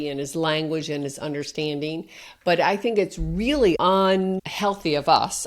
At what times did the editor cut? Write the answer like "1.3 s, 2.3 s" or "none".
3.8 s, 4.5 s